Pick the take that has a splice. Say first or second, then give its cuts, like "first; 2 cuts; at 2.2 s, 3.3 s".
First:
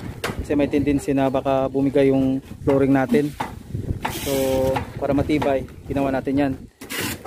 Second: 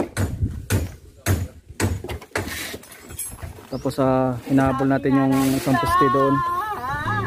first; 1 cut; at 2.5 s